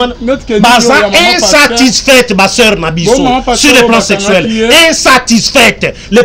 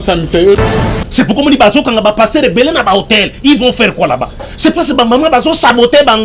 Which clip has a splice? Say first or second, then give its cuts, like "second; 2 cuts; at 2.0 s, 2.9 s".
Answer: second; 1 cut; at 1.0 s